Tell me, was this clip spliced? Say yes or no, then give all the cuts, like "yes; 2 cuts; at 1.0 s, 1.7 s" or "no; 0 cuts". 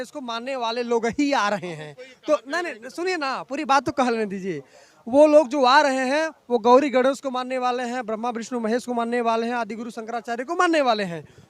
no; 0 cuts